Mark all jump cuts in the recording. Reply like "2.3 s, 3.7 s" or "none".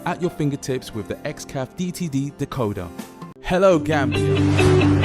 4.1 s